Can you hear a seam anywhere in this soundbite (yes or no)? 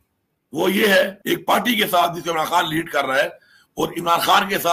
yes